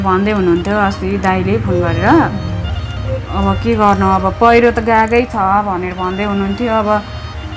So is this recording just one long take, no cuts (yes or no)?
yes